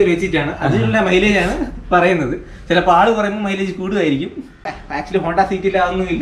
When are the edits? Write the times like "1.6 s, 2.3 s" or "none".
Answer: 4.7 s